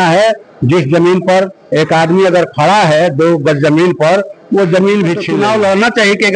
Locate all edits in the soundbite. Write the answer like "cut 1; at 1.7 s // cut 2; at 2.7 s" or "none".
cut 1; at 5.3 s